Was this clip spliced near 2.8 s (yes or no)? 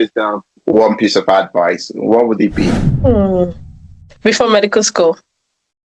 yes